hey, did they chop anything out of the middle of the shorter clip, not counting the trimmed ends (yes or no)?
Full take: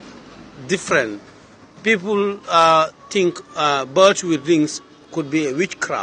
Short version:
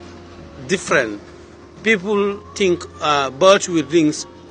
yes